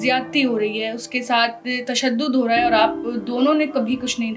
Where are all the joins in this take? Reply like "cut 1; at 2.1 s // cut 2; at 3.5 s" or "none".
none